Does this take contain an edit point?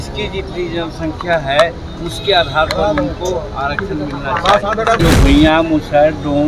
yes; 1 cut; at 5.0 s

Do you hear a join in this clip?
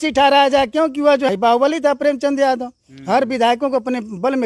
yes; 1 cut; at 1.3 s

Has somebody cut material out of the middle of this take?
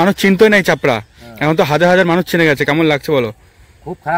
no; 0 cuts

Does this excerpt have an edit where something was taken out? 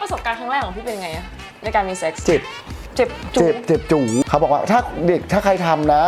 yes; 1 cut; at 4.2 s

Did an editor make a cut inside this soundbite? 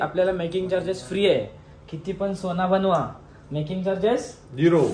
no; 0 cuts

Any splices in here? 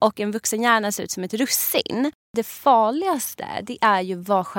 yes; 1 cut; at 2.2 s

